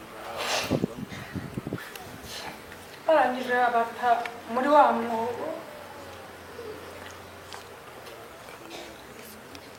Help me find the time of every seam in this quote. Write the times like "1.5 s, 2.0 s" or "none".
none